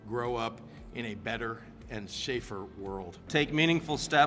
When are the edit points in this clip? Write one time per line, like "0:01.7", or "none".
0:03.3